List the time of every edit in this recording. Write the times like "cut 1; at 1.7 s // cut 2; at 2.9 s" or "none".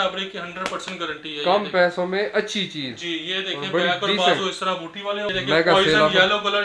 cut 1; at 5.3 s